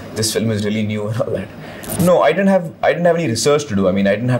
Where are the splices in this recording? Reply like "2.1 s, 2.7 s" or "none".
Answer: 1.8 s